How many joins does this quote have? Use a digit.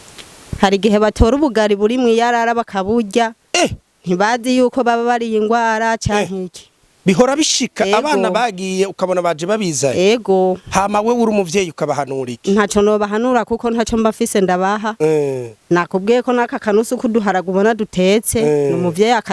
0